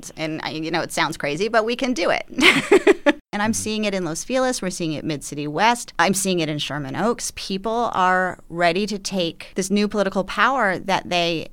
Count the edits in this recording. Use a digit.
3